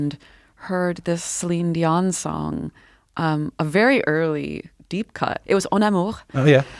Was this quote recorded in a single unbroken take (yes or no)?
yes